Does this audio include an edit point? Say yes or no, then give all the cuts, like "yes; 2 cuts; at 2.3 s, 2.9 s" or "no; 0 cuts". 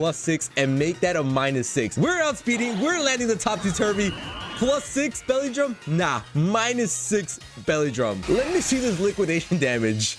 yes; 2 cuts; at 1.9 s, 8.2 s